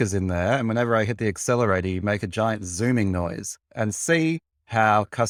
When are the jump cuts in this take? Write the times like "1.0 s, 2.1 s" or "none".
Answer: none